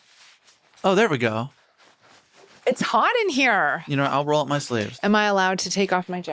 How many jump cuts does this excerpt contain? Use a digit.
1